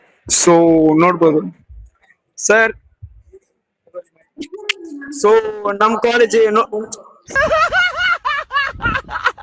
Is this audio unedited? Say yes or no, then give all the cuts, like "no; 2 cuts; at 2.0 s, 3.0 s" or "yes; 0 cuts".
yes; 0 cuts